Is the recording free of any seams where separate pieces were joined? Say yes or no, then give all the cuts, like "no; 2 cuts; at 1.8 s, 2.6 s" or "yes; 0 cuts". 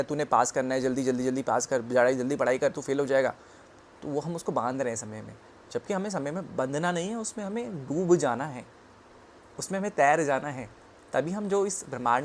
yes; 0 cuts